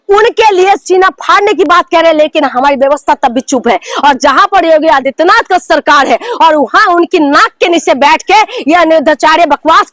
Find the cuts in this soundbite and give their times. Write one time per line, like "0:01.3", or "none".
none

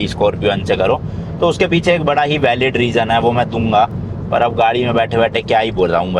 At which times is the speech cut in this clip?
none

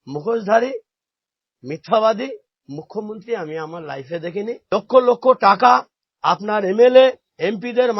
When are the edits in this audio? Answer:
0:04.6

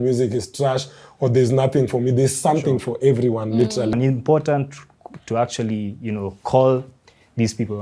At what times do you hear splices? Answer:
0:03.9

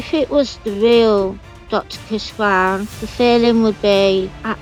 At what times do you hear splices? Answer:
none

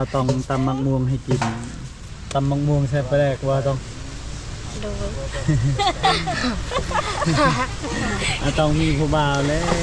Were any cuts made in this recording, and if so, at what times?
0:01.9

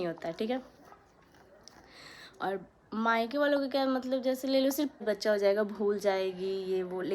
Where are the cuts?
0:05.0

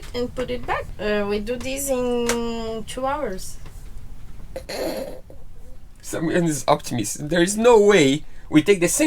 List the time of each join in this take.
0:00.9

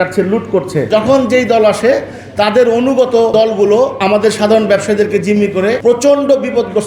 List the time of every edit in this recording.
0:00.9
0:03.8
0:05.8

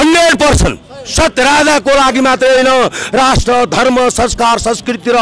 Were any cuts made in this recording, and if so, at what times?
none

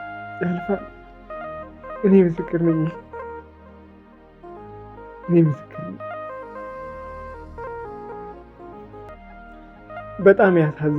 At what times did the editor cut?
0:09.2

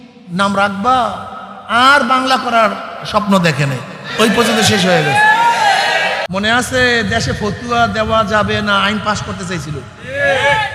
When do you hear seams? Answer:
0:06.2

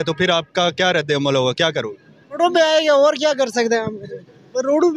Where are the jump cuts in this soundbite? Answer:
0:02.4

